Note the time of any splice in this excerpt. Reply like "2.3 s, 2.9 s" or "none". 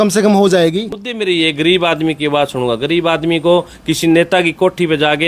0.9 s